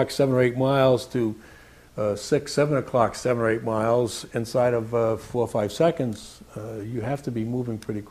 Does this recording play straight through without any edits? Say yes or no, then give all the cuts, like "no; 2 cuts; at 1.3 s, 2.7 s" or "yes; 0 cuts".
yes; 0 cuts